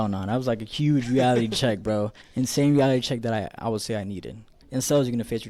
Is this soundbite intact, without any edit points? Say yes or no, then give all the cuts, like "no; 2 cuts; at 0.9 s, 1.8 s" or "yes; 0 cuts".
no; 1 cut; at 4.6 s